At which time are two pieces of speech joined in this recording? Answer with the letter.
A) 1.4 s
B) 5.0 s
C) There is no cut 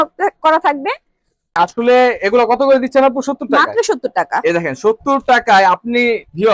A